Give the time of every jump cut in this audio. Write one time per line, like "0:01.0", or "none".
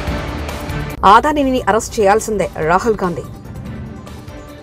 0:00.9